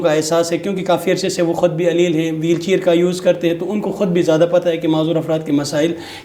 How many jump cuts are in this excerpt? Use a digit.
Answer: 0